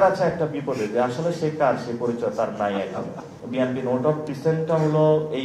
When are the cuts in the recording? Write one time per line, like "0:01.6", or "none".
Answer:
0:03.4